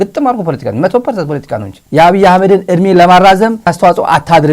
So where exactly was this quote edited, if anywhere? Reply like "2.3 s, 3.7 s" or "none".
1.8 s, 3.7 s